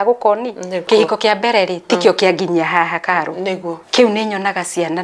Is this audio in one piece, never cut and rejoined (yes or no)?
no